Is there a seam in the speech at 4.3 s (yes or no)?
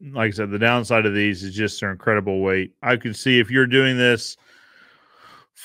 no